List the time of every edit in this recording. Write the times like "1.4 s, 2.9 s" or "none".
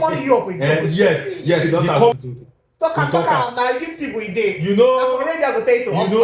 2.1 s